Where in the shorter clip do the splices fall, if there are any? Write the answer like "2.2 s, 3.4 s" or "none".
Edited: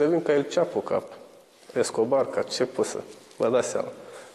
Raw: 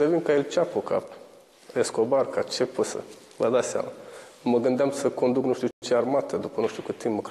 none